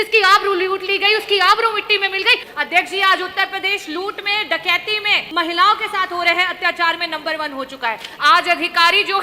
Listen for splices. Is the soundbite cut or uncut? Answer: cut